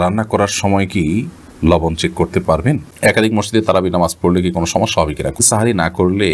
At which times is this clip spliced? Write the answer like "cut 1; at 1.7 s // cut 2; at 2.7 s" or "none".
cut 1; at 2.9 s // cut 2; at 5.4 s